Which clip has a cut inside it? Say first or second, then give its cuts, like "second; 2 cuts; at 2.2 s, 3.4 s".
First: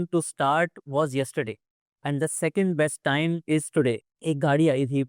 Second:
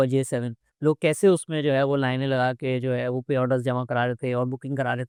first; 1 cut; at 4.1 s